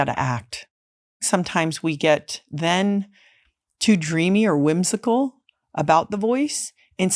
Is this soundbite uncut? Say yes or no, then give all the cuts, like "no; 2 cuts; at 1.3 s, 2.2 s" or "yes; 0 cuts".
no; 1 cut; at 1.3 s